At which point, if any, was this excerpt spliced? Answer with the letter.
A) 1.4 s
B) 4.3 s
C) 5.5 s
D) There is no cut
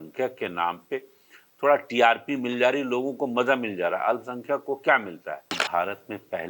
C